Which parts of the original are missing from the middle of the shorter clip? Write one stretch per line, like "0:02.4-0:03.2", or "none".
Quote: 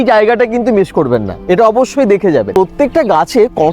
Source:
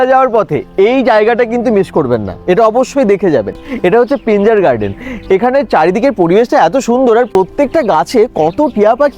0:03.5-0:07.3